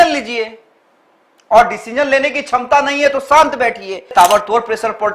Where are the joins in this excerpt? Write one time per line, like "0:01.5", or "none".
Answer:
0:04.1